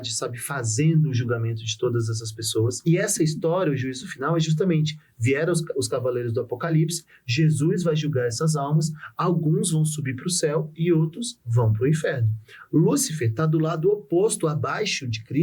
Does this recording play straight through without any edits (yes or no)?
no